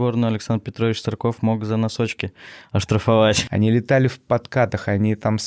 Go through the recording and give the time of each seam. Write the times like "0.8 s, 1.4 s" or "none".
3.4 s